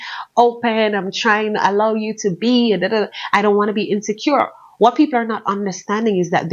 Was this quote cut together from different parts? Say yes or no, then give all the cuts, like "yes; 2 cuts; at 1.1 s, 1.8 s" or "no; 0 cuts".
no; 0 cuts